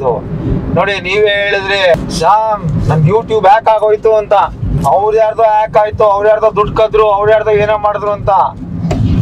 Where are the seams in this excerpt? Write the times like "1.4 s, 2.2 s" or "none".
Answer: 2.0 s, 4.7 s